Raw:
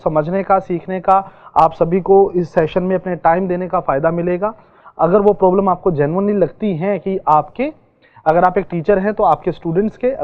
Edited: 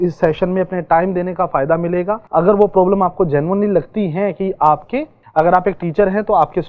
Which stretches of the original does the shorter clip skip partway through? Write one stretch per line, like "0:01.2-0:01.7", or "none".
0:04.5-0:04.9
0:07.8-0:08.1